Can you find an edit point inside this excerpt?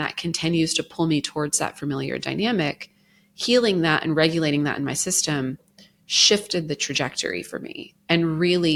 no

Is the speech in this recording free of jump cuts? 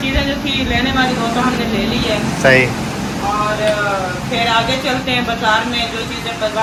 yes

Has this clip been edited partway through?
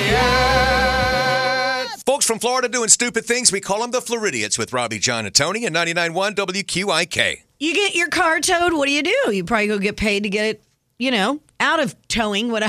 yes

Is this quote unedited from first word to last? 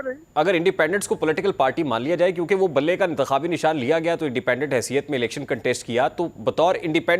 yes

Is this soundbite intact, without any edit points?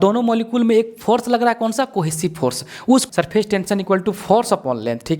no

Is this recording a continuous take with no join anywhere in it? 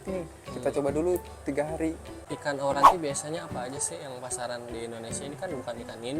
no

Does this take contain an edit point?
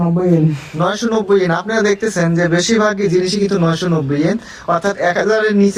no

